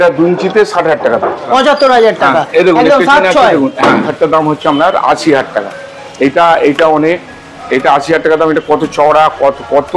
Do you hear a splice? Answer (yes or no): yes